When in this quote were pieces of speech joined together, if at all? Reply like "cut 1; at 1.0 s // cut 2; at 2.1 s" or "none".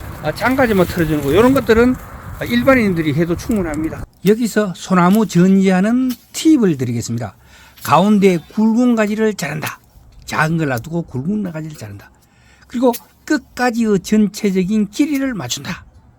cut 1; at 4.0 s